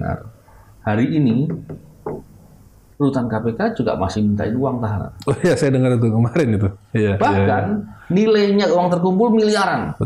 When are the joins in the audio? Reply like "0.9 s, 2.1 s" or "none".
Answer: none